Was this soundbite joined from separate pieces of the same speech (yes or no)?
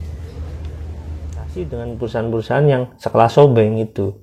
yes